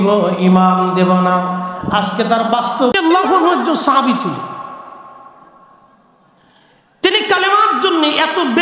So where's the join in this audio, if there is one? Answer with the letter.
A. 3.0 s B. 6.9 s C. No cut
A